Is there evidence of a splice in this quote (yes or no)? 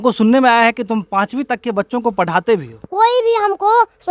yes